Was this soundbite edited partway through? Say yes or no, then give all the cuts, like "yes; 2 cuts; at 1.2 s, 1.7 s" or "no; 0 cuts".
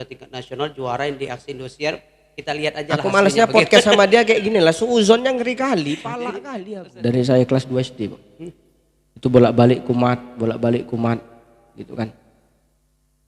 yes; 1 cut; at 6.5 s